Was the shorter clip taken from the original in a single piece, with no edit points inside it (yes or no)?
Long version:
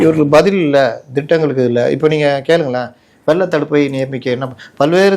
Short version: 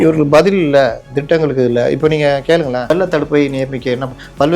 no